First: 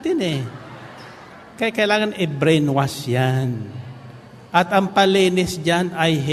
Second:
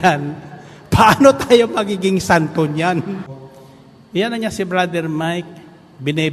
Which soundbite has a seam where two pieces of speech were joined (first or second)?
second